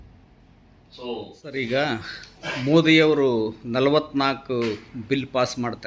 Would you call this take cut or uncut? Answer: cut